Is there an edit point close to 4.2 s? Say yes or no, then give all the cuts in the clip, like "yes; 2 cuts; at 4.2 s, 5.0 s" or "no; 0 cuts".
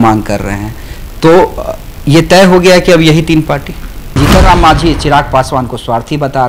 yes; 1 cut; at 4.2 s